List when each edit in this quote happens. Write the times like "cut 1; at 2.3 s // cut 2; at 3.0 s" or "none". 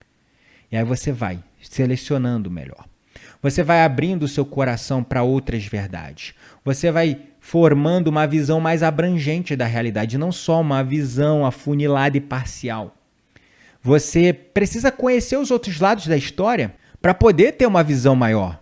cut 1; at 16.8 s